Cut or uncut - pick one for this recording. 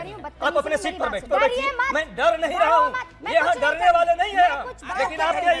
cut